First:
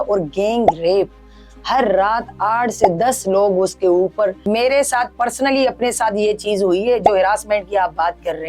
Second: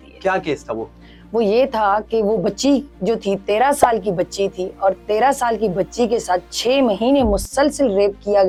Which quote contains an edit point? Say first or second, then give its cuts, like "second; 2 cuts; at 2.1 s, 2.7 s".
first; 1 cut; at 4.4 s